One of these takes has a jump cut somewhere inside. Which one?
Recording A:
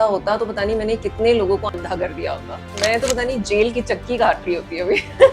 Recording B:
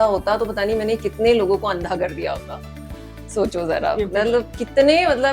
A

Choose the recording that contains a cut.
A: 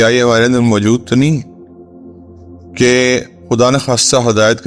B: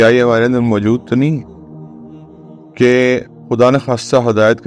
A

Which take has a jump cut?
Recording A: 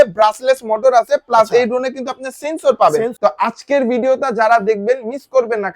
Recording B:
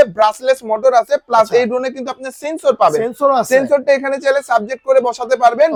A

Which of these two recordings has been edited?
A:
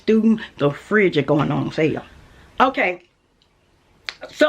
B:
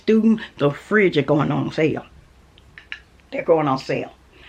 A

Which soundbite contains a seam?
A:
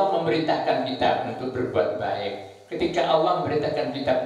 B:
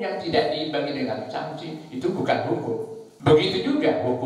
B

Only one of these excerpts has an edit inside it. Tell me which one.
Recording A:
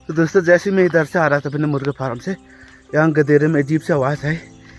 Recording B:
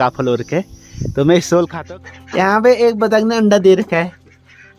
B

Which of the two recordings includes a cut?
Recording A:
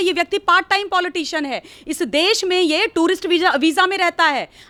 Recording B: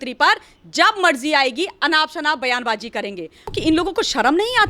B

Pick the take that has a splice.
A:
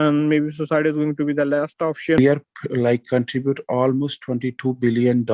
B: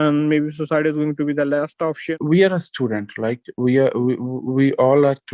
A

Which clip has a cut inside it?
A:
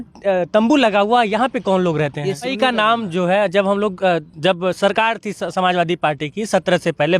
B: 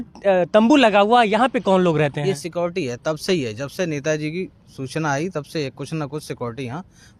A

